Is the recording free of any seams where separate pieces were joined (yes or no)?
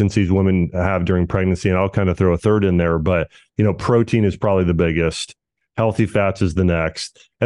yes